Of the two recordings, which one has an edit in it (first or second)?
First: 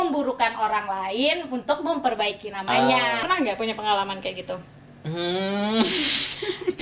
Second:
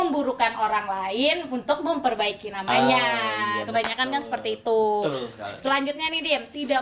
first